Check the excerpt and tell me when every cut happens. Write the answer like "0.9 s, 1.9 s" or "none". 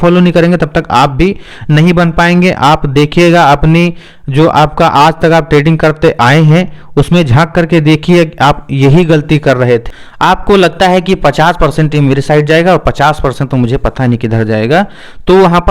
10.0 s